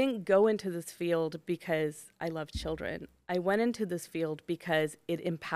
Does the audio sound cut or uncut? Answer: uncut